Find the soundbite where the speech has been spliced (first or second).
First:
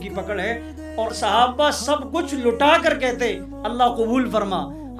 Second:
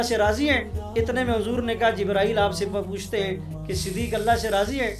first